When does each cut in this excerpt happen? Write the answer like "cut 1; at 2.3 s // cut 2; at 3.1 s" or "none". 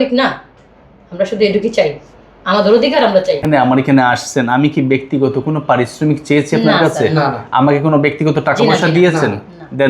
cut 1; at 3.4 s